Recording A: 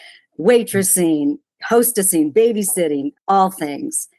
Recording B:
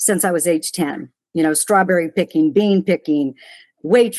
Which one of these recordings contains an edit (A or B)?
A